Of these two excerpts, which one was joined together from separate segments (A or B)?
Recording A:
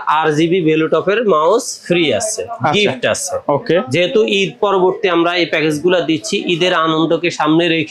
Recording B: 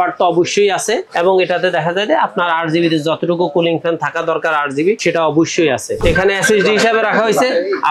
B